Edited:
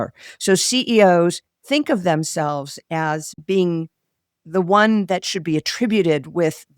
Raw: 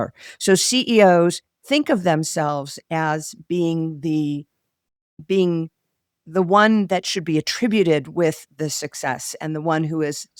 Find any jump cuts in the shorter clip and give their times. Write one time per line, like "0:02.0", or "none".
0:03.3

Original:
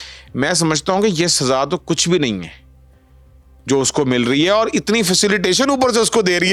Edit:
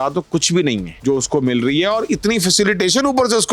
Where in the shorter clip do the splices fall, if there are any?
0:00.9

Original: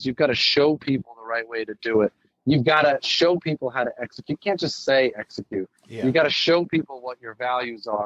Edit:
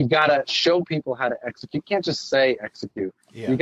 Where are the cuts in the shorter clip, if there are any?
none

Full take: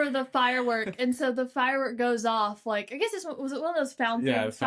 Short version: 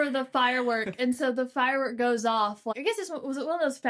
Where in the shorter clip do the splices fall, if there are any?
0:02.7

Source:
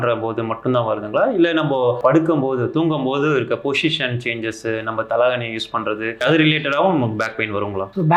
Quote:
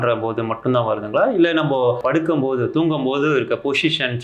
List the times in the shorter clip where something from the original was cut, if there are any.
none

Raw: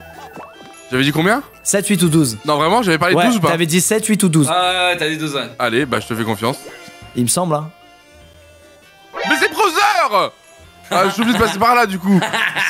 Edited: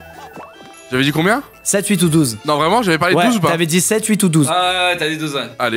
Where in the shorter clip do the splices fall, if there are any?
none

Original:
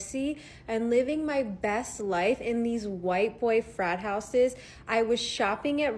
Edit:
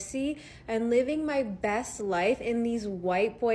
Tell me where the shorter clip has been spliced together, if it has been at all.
none

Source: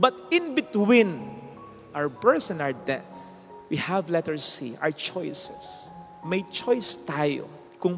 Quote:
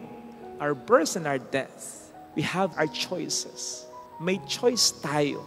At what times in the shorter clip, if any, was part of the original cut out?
0:02.7

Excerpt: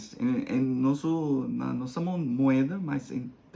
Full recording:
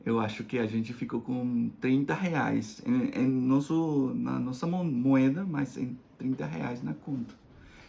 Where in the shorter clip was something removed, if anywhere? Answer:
none

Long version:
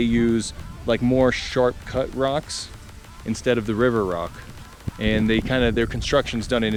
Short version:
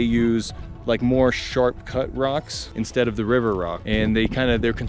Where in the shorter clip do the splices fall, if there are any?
0:02.6
0:03.8

